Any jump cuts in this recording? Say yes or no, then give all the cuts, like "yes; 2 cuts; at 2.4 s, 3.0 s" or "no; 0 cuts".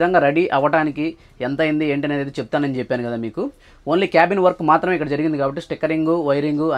no; 0 cuts